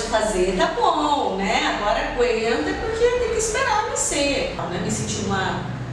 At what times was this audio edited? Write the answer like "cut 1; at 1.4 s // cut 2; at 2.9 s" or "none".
none